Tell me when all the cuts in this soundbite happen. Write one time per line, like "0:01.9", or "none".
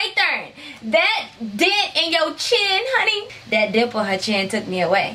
0:03.3

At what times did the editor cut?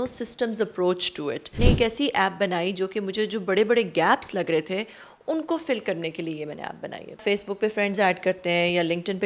0:01.6
0:07.2

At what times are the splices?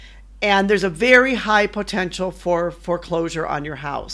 none

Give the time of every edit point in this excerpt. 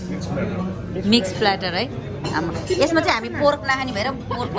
none

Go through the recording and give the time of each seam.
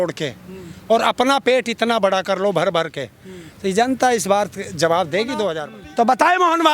0:05.6

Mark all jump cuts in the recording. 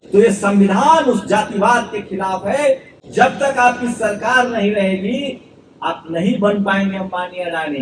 0:03.0

